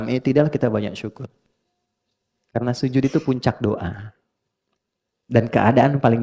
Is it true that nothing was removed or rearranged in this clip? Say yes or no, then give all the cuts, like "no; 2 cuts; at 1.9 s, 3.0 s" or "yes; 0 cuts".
yes; 0 cuts